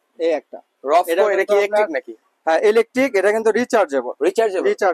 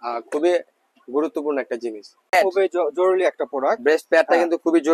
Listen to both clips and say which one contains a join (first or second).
second